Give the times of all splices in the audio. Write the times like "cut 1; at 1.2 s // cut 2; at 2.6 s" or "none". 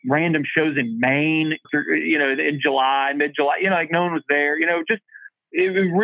cut 1; at 1.6 s